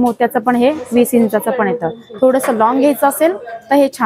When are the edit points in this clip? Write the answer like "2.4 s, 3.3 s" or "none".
none